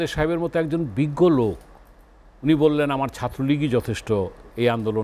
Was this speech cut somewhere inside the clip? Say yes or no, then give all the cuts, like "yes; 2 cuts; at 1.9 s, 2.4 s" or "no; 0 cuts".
no; 0 cuts